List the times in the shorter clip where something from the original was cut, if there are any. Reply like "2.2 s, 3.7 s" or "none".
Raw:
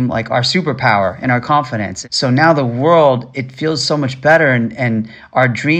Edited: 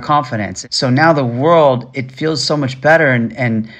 none